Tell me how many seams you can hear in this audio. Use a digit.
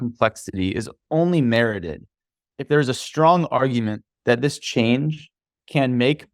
1